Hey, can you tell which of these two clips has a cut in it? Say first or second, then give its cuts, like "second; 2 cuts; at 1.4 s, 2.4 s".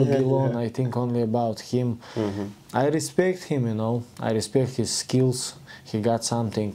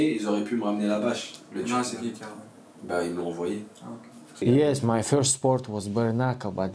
second; 1 cut; at 4.4 s